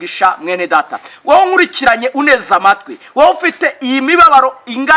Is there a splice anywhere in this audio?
no; 0 cuts

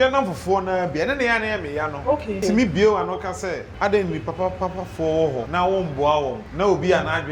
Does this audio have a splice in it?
yes; 4 cuts; at 2.4 s, 3.7 s, 5.5 s, 6.4 s

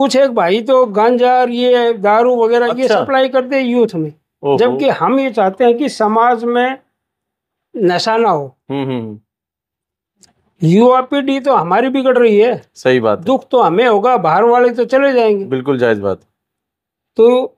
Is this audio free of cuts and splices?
yes; 0 cuts

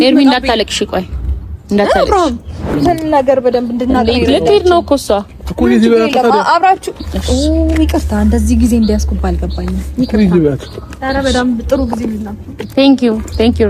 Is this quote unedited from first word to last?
no; 1 cut; at 2.8 s

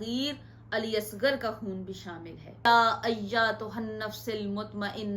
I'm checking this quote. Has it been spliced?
yes; 1 cut; at 2.6 s

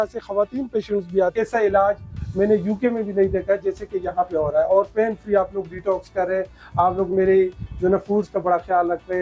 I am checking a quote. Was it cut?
yes; 1 cut; at 1.3 s

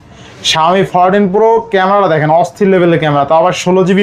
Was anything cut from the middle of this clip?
no; 0 cuts

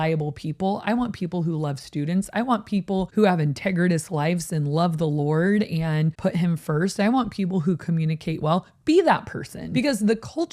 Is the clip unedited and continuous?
no; 3 cuts; at 3.1 s, 6.1 s, 9.6 s

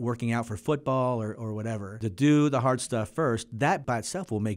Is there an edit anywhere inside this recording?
yes; 2 cuts; at 2.0 s, 3.8 s

